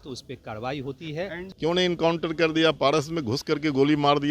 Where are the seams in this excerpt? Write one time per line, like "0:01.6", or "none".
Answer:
0:01.4